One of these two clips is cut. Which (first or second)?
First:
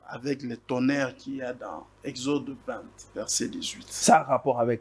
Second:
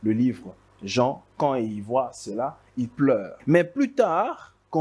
second